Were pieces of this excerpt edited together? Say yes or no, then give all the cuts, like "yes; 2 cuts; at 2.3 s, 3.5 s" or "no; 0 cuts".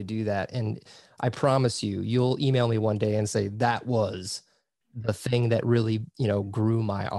no; 0 cuts